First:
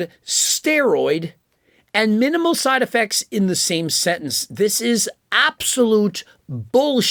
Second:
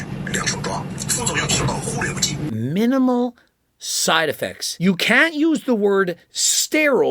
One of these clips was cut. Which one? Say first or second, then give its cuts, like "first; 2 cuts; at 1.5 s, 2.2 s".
second; 3 cuts; at 0.9 s, 2.4 s, 4.6 s